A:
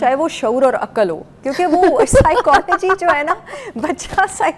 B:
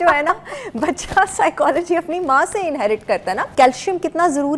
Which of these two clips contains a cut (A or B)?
B